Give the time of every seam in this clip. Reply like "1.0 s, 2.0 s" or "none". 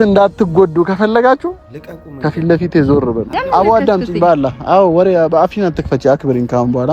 3.4 s